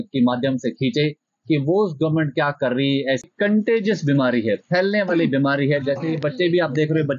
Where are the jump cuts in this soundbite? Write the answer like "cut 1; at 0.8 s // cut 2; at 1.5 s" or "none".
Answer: cut 1; at 3.2 s